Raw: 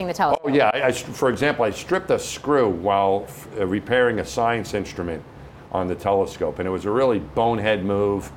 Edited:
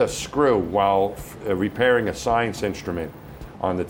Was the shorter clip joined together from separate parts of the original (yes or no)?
no